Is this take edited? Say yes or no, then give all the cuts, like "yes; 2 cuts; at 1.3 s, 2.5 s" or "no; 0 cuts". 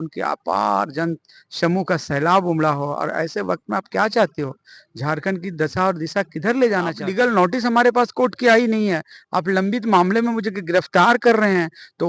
yes; 1 cut; at 7.0 s